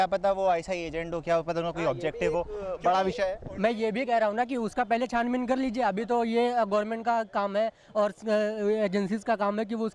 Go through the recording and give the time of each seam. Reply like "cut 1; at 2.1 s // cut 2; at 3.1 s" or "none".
none